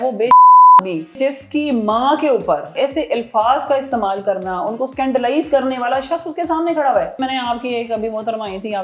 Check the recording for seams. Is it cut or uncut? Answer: cut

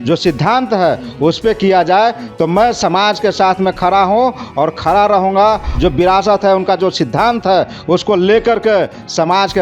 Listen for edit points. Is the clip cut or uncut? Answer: cut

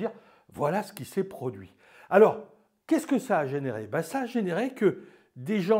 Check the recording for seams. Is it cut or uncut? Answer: uncut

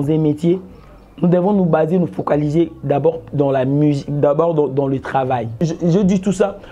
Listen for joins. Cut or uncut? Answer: cut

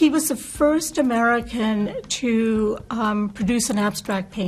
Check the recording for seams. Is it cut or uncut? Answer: uncut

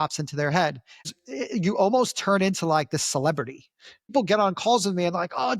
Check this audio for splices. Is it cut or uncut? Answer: cut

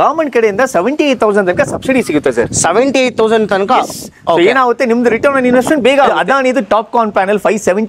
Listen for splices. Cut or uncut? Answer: cut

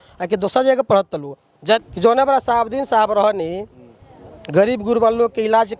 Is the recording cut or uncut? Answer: cut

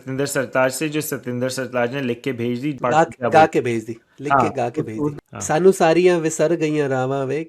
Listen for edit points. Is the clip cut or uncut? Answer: cut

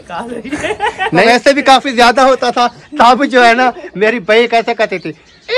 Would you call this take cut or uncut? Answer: cut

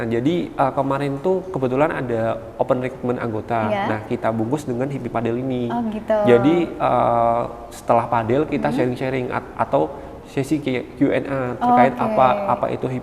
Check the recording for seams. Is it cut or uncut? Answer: uncut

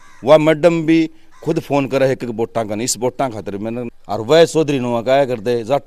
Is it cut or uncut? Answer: cut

